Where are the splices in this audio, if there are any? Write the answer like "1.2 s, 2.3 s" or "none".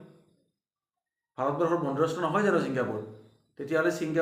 none